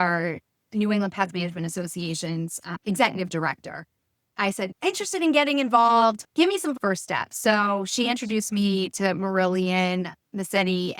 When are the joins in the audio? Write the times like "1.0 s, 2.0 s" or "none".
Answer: 2.8 s, 4.4 s, 6.8 s